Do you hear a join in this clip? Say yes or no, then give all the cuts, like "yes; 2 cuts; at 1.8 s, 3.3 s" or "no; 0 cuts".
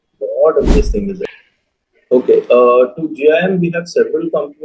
yes; 1 cut; at 1.2 s